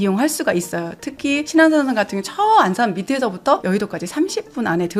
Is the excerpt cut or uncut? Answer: cut